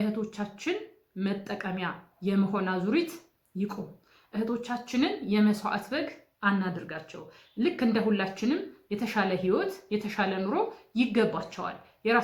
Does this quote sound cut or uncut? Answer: uncut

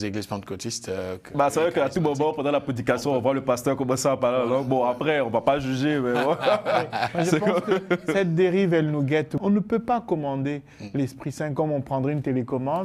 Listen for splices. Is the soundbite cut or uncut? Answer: cut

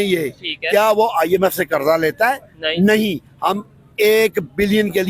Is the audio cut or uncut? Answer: uncut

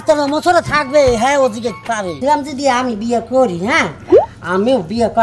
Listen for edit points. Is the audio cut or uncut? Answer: cut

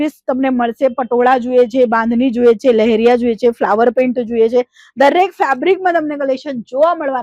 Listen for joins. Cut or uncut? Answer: uncut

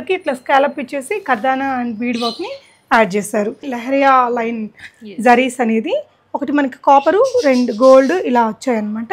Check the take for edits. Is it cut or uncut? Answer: cut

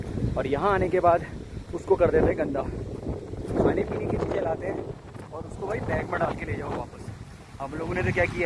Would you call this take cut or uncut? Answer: uncut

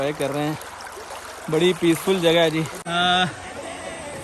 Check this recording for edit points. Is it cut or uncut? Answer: cut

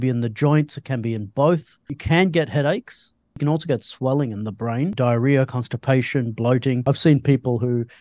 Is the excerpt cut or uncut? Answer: cut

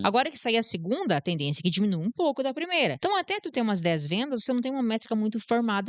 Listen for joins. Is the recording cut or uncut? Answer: cut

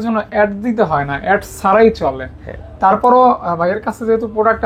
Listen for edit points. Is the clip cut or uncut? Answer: uncut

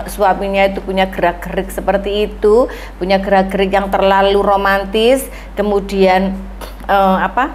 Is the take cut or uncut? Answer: uncut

